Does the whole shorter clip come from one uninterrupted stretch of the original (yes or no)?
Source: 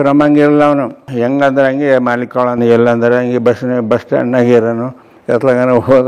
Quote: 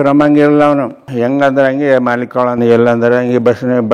yes